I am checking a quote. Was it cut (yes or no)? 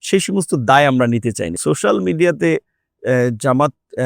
yes